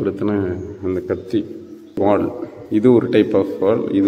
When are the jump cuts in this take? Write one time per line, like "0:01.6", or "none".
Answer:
0:02.0